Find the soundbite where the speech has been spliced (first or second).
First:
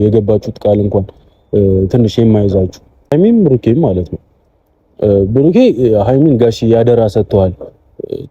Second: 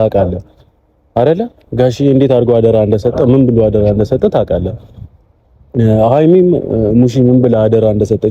first